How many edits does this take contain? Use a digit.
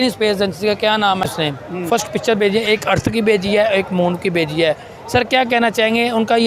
1